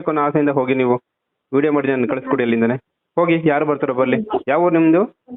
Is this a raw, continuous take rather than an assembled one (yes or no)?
yes